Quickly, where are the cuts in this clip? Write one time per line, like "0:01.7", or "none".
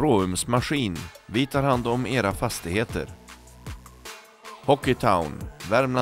none